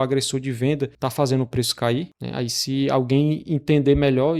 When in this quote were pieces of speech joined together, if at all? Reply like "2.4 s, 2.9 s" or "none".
0.9 s, 2.2 s